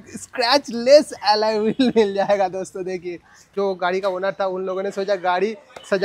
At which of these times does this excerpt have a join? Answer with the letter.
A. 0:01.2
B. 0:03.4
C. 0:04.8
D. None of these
B